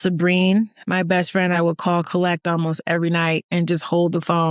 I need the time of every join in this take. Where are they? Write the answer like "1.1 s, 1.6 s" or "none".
1.6 s

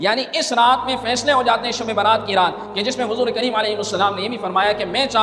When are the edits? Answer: none

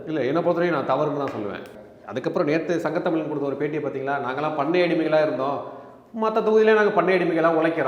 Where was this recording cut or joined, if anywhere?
1.7 s

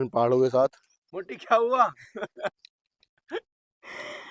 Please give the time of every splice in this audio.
1.3 s

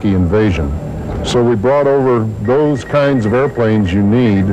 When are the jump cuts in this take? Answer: 1.9 s

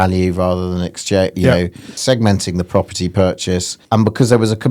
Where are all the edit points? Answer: 2.0 s, 3.7 s

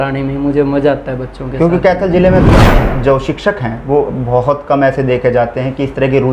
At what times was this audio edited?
2.5 s

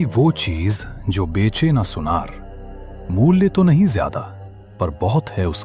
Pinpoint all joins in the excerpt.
none

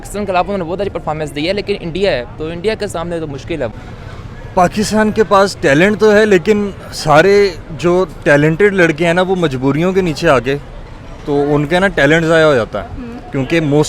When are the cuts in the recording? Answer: 3.7 s

